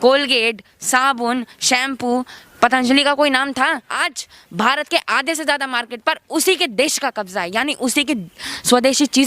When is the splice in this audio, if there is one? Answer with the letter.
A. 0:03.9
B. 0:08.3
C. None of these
A